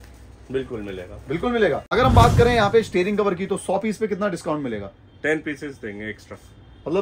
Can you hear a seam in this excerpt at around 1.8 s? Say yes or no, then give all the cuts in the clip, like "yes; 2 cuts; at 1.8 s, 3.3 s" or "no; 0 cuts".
yes; 1 cut; at 1.8 s